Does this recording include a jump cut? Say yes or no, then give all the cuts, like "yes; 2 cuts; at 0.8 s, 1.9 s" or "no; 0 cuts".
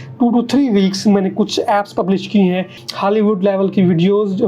yes; 1 cut; at 2.7 s